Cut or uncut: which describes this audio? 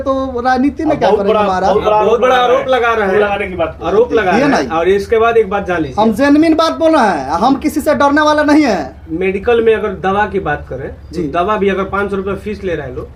uncut